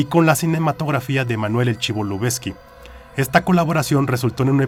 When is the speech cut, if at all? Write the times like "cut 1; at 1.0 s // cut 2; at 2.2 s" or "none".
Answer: none